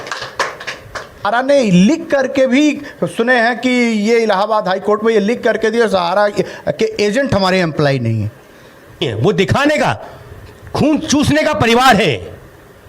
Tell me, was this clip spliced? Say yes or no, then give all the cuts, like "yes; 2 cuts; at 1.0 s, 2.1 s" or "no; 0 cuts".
yes; 2 cuts; at 1.2 s, 9.0 s